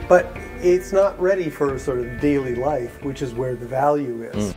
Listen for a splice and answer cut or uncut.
uncut